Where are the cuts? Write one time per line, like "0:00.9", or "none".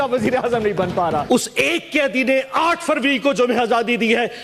0:01.2

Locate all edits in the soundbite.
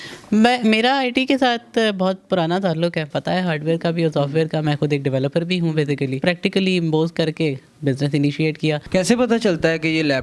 0:03.1
0:06.2
0:08.9

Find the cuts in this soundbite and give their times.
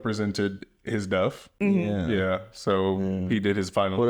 0:01.5

